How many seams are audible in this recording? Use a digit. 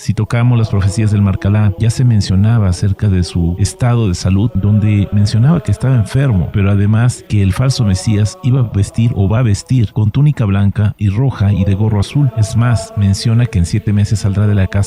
0